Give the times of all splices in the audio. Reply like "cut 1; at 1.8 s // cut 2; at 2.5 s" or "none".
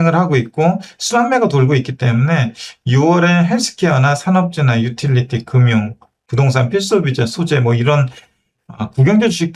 none